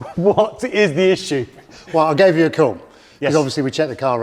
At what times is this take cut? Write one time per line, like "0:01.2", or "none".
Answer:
none